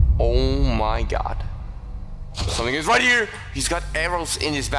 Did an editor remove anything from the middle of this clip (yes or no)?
yes